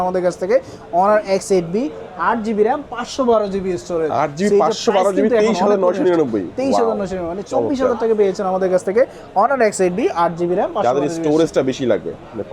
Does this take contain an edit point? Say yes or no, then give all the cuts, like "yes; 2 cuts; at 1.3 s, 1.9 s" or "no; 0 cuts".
no; 0 cuts